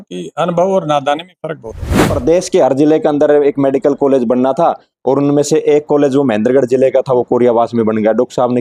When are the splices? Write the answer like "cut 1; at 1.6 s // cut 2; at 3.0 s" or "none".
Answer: cut 1; at 2.1 s